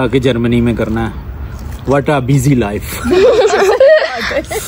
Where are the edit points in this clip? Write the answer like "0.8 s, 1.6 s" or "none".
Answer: none